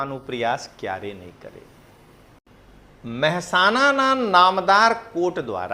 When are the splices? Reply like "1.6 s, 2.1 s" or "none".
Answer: 2.4 s